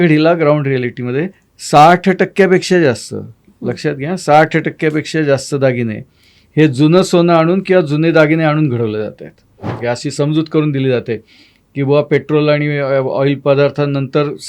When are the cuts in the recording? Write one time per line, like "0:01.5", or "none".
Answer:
0:09.7